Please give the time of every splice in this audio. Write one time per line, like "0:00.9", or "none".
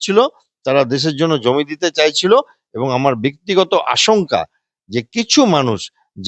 none